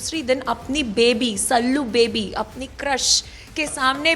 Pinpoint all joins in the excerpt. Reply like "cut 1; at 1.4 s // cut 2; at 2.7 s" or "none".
none